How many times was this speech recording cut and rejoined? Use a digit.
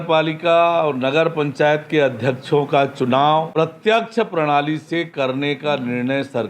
1